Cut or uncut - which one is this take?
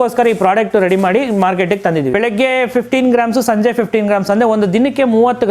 cut